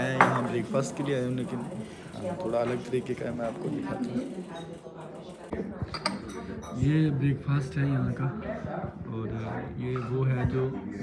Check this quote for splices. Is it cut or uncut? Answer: uncut